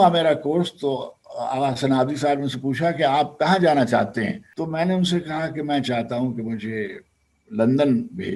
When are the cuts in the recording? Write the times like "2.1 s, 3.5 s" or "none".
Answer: 4.4 s